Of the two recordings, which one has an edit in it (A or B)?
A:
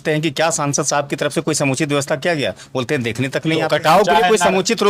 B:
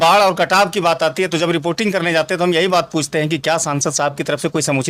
A